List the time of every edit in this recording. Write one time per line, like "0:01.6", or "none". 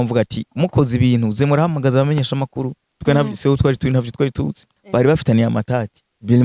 0:04.7